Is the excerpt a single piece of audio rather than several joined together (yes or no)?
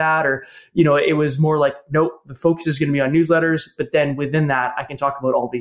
yes